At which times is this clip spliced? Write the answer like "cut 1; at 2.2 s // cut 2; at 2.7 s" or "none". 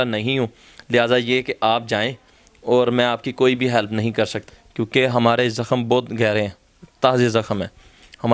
cut 1; at 4.4 s